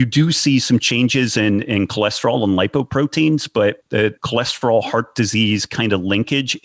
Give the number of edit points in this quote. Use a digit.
1